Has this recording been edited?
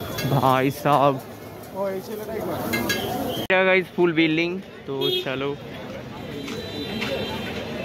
yes; 1 cut; at 3.4 s

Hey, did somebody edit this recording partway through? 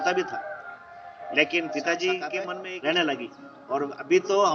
yes; 1 cut; at 2.6 s

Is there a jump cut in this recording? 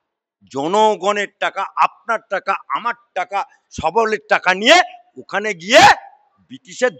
no; 0 cuts

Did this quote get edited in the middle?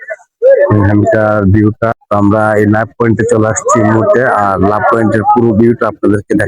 yes; 1 cut; at 1.9 s

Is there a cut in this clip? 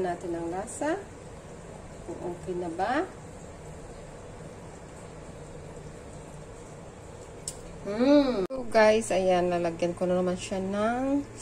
yes; 1 cut; at 8.4 s

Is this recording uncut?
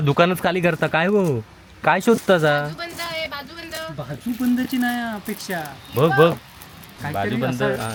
yes; 0 cuts

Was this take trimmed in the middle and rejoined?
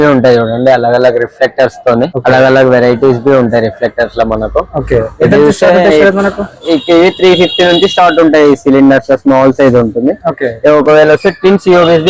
no; 0 cuts

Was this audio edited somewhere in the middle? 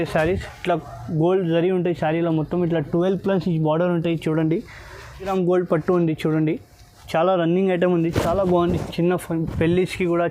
yes; 1 cut; at 5.3 s

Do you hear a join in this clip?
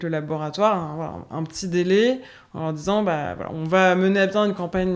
no; 0 cuts

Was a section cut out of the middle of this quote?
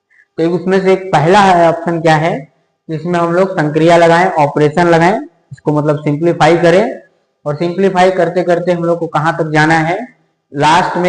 no; 0 cuts

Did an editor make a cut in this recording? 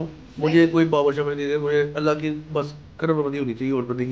no; 0 cuts

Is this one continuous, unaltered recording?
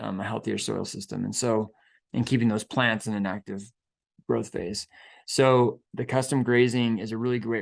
no; 1 cut; at 5.8 s

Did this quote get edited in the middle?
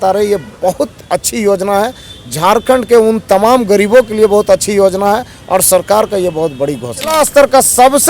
yes; 1 cut; at 7.1 s

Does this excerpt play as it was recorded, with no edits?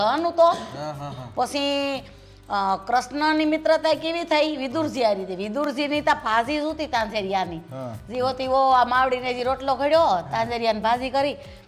yes; 0 cuts

